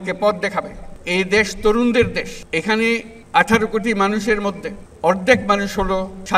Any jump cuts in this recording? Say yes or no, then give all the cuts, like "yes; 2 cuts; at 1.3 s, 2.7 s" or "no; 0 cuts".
no; 0 cuts